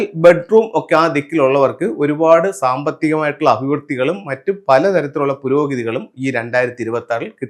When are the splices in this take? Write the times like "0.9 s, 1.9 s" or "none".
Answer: none